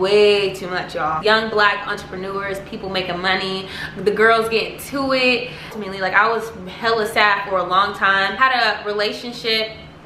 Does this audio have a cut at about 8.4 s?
yes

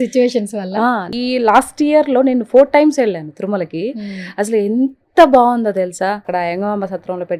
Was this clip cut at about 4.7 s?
no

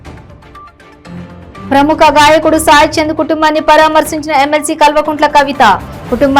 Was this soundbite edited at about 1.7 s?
no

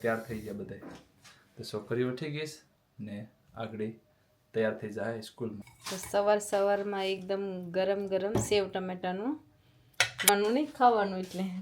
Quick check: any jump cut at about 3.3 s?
no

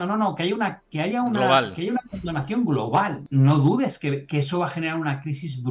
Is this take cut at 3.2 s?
yes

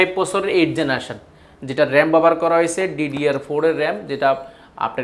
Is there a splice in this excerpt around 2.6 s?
no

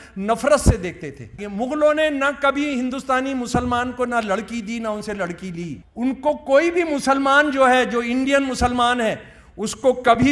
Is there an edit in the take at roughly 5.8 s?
yes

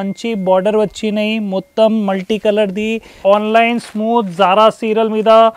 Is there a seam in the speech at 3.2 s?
yes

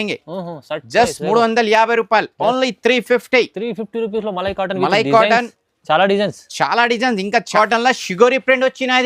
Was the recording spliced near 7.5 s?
yes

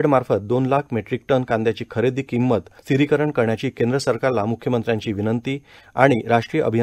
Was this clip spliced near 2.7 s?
yes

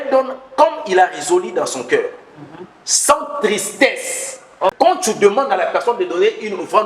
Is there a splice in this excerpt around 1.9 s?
no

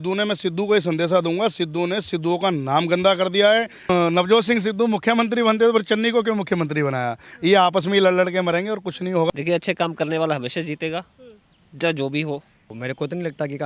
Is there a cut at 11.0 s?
no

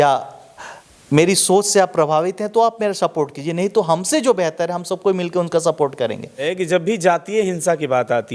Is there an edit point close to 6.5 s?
yes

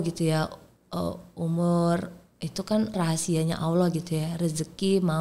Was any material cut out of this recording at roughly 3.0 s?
yes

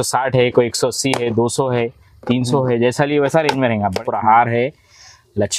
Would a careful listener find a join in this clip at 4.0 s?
yes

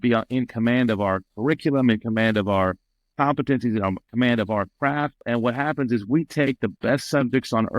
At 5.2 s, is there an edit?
yes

